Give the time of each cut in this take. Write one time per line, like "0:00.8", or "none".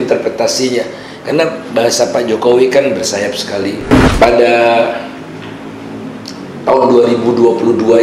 0:04.1